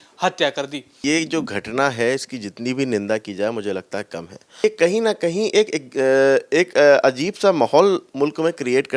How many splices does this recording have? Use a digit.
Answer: 2